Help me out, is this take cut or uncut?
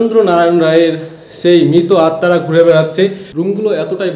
cut